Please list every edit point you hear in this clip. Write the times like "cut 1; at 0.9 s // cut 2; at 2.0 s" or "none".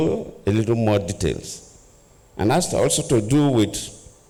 none